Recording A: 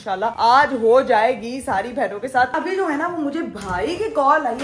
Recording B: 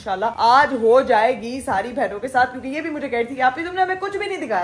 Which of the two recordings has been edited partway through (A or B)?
A